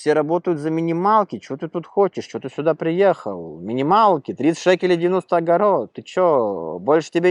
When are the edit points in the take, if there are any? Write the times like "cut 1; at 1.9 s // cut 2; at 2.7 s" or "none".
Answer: none